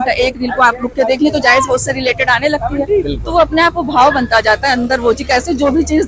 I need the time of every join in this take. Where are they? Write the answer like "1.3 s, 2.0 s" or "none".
none